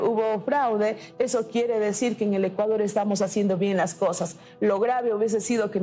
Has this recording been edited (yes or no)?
no